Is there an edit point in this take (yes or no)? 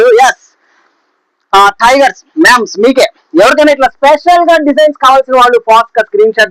no